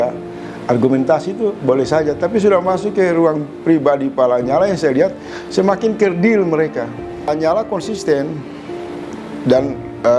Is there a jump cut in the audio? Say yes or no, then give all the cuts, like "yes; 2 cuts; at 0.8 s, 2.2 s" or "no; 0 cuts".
yes; 1 cut; at 7.3 s